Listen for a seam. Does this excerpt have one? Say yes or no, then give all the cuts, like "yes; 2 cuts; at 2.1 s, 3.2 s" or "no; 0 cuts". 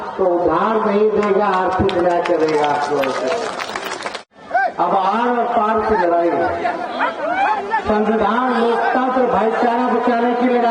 no; 0 cuts